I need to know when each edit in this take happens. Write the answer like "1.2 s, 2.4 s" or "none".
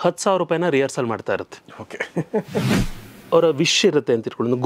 2.9 s